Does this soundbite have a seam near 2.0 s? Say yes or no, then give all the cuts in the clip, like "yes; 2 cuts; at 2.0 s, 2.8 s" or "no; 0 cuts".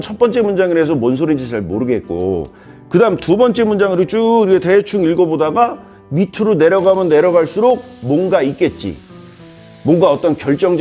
no; 0 cuts